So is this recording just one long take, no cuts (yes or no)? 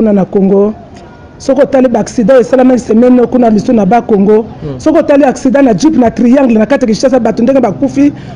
yes